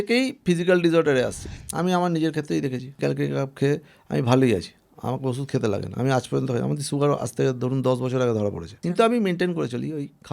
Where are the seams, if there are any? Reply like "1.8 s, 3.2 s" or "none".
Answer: 1.4 s, 3.0 s, 8.7 s